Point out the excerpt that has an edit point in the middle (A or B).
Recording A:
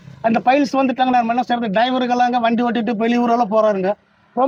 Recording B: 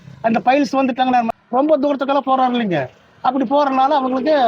B